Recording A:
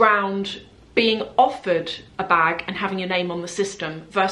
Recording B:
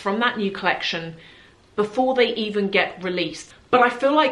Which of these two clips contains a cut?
B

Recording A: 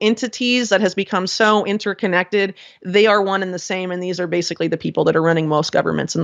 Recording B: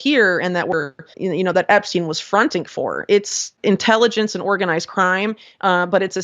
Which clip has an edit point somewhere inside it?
B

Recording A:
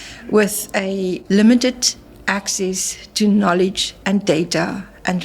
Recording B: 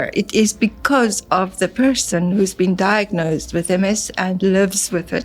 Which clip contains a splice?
A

